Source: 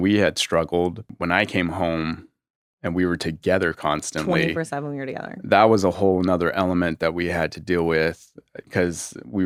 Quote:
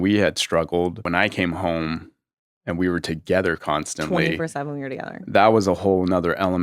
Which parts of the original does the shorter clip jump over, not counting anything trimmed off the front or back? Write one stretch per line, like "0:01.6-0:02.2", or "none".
0:01.0-0:01.2